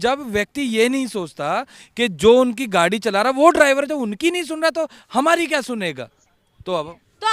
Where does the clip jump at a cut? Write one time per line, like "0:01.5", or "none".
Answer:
none